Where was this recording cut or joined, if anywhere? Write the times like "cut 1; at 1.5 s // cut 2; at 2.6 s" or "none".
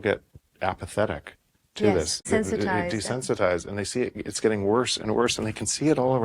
cut 1; at 2.2 s